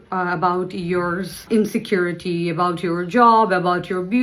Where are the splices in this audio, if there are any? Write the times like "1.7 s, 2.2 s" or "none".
1.4 s